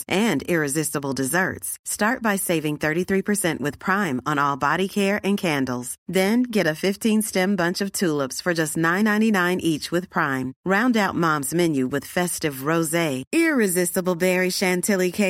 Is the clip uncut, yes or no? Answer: yes